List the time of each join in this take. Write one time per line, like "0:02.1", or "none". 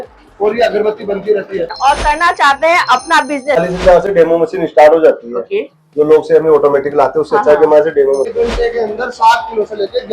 0:01.7
0:03.6
0:08.3